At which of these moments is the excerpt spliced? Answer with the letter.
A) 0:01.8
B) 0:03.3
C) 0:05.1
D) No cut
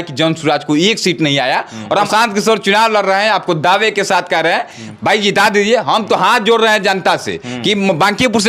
A